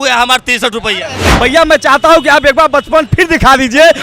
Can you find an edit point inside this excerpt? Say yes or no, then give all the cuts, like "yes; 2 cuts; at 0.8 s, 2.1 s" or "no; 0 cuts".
yes; 1 cut; at 1.3 s